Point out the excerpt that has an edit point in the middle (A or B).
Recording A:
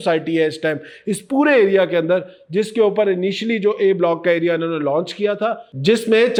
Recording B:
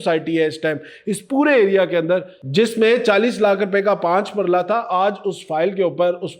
B